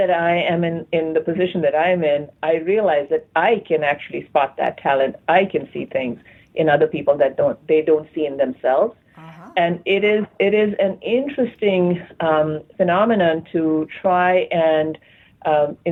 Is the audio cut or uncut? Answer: uncut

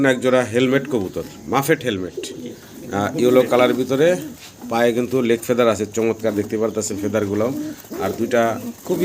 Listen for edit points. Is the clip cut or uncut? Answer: uncut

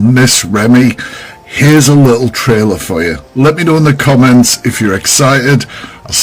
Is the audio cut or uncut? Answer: uncut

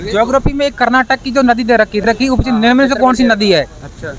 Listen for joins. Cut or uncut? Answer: cut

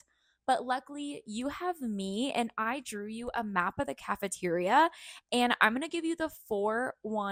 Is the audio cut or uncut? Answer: uncut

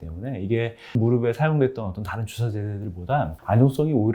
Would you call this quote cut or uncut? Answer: cut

